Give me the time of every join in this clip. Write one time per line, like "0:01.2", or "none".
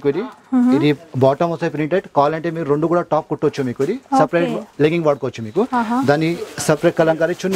none

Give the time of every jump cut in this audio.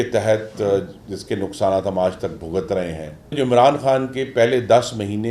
0:03.4

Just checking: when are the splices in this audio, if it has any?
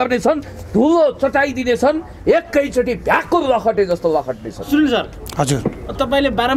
none

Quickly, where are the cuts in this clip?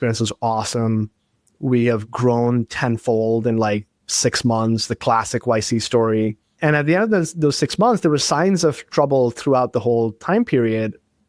0:06.4

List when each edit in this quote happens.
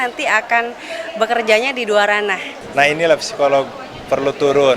0:02.5

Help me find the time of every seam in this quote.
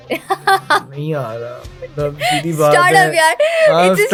none

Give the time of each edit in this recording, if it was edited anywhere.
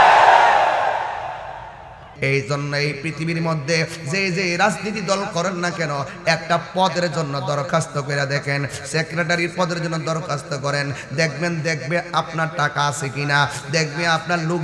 0:02.1

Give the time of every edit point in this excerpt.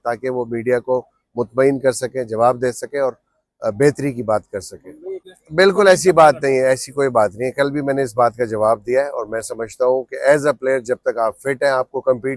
0:05.3

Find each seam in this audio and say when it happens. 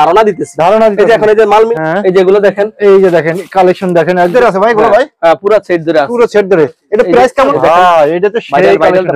0:01.7
0:04.3
0:07.5

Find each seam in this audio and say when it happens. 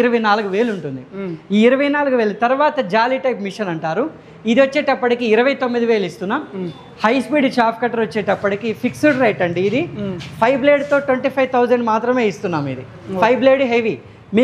none

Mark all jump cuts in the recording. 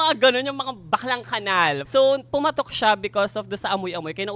0:01.8

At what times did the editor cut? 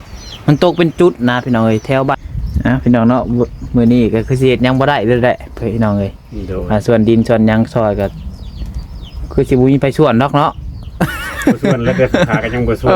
0:02.2

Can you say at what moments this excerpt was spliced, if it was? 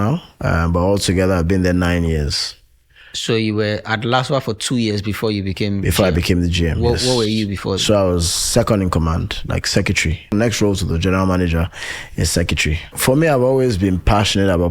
0:10.3
0:12.9

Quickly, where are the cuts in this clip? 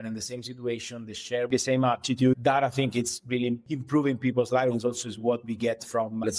0:01.5
0:03.6

